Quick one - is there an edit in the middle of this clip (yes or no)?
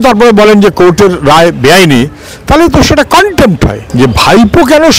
yes